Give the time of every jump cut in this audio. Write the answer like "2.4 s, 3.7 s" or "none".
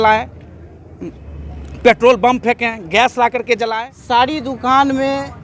3.7 s